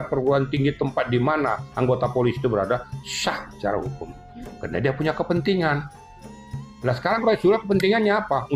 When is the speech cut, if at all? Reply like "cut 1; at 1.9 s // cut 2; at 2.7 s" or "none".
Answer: none